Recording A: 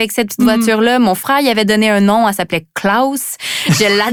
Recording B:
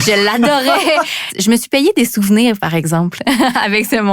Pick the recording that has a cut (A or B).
B